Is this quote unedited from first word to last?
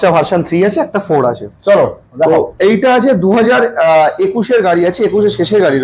yes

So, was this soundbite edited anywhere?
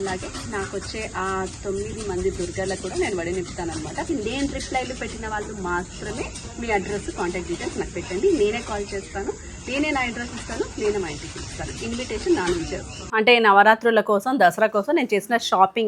yes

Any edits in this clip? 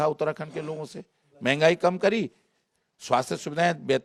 no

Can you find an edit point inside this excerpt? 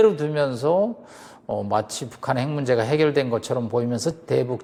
no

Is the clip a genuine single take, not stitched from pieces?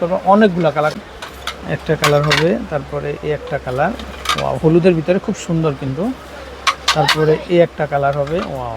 no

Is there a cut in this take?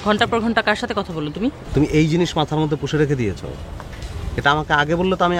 yes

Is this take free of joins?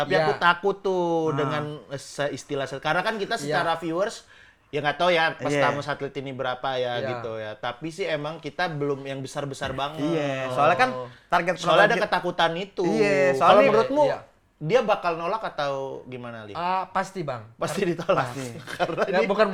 yes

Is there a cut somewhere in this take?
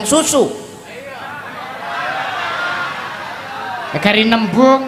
no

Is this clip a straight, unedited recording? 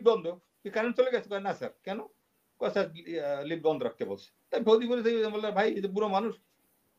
yes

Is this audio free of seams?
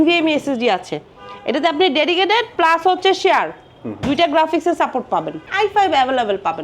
no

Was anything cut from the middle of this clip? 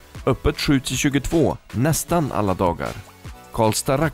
no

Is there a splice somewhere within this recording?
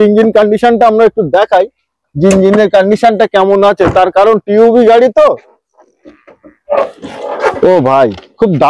no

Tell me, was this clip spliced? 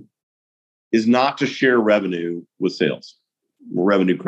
no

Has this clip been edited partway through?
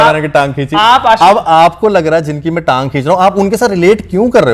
no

